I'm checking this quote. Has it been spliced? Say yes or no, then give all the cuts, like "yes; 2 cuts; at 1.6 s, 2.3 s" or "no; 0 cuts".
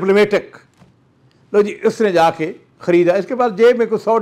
no; 0 cuts